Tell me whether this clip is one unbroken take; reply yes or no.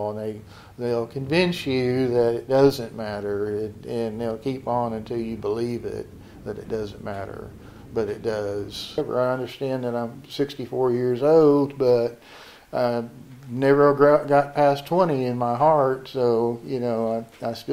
no